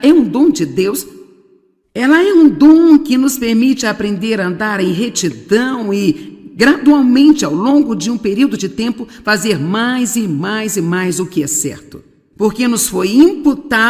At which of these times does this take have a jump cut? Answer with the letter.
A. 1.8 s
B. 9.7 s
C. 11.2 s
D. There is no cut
B